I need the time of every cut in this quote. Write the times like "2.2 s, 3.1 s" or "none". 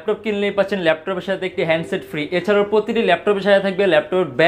none